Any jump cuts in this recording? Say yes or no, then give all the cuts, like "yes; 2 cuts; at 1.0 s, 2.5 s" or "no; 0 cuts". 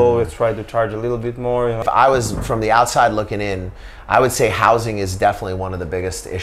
yes; 1 cut; at 1.8 s